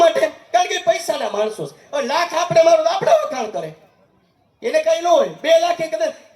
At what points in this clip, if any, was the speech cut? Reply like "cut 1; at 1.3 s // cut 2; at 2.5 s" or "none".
none

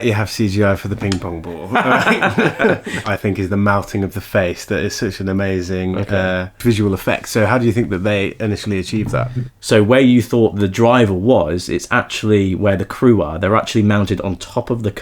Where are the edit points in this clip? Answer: cut 1; at 3.1 s // cut 2; at 9.5 s

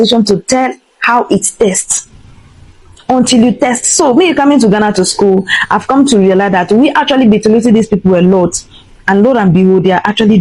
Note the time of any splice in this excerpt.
none

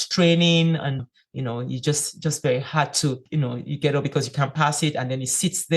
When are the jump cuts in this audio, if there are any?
cut 1; at 1.0 s // cut 2; at 3.2 s

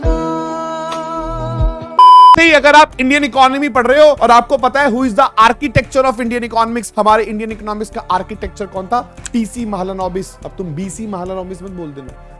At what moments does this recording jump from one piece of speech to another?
cut 1; at 2.4 s // cut 2; at 4.2 s // cut 3; at 6.8 s // cut 4; at 10.4 s

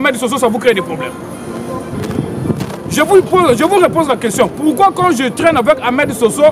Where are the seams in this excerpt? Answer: none

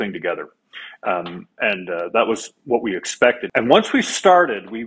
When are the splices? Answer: cut 1; at 3.4 s

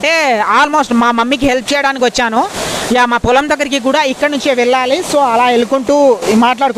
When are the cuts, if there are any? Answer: none

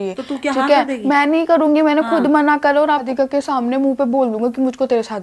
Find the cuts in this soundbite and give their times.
cut 1; at 3.1 s

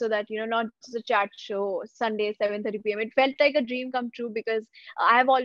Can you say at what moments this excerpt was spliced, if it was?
none

